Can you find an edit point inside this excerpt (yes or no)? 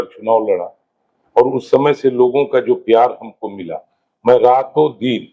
no